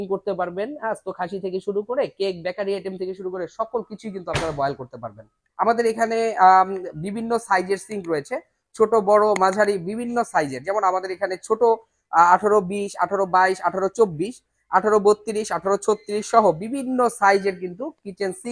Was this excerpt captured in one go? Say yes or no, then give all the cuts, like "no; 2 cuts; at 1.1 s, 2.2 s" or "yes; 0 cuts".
no; 1 cut; at 5.4 s